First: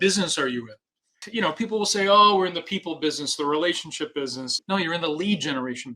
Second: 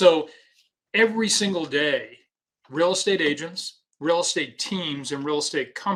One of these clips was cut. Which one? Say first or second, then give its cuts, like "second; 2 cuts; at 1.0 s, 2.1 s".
first; 2 cuts; at 1.2 s, 4.5 s